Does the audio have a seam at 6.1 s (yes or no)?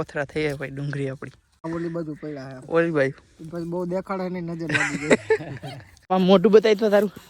yes